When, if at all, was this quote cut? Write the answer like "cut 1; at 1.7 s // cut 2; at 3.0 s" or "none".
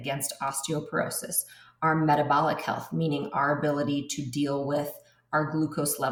none